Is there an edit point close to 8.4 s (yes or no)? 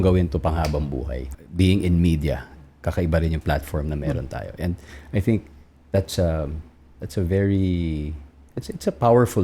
no